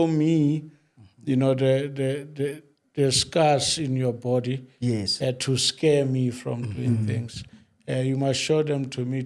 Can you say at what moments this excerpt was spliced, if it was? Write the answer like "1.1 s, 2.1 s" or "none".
none